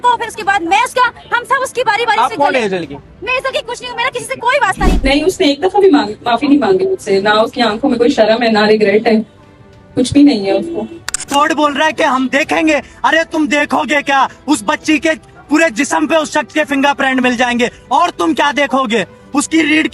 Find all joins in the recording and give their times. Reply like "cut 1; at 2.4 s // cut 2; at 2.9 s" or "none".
cut 1; at 4.8 s // cut 2; at 11.3 s